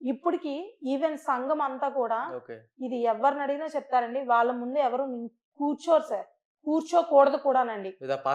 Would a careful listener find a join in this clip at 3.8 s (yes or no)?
no